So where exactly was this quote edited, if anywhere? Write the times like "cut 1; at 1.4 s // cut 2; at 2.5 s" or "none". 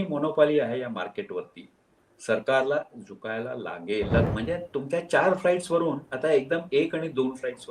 cut 1; at 4.3 s